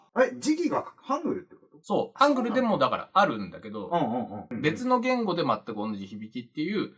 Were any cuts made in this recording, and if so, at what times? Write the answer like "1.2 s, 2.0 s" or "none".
4.5 s